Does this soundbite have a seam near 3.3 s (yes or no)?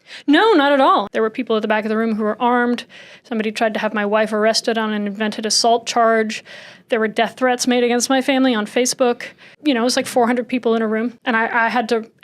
no